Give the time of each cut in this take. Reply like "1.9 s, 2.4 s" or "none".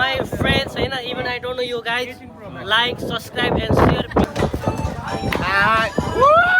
4.2 s